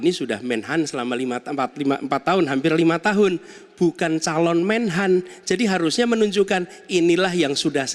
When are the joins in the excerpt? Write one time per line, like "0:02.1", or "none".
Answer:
none